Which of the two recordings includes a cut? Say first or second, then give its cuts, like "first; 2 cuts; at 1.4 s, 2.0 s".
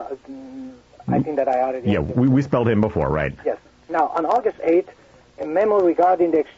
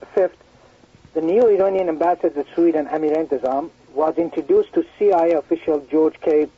first; 1 cut; at 4.4 s